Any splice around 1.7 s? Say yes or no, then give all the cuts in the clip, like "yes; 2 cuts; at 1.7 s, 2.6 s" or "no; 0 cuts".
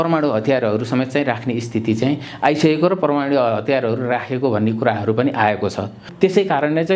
no; 1 cut; at 6.0 s